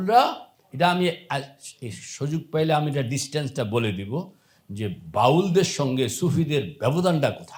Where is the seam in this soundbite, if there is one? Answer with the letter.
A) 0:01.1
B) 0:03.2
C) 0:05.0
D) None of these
D